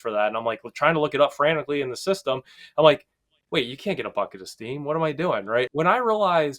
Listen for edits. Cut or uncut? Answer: cut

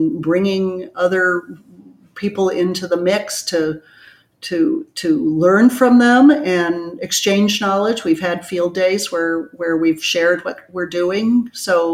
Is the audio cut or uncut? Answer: uncut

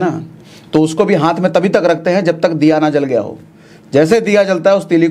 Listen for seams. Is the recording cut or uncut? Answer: uncut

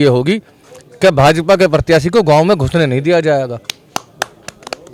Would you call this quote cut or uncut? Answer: uncut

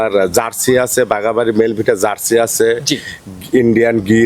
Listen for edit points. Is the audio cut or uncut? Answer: uncut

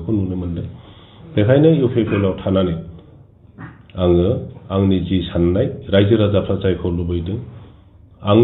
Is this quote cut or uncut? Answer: uncut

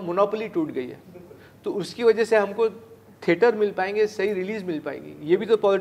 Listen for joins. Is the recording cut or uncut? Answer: uncut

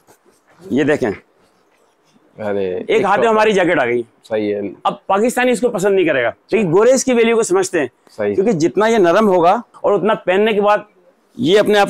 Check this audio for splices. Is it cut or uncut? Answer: cut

